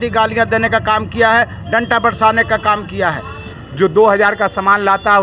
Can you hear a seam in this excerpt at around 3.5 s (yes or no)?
yes